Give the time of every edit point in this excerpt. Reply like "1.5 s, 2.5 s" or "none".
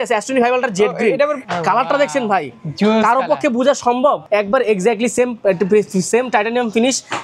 1.4 s, 4.2 s